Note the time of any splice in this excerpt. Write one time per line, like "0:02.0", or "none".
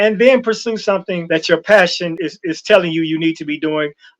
0:01.1
0:02.2